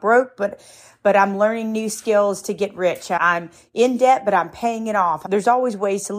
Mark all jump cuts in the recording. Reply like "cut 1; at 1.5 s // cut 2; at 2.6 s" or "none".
cut 1; at 3.2 s // cut 2; at 5.2 s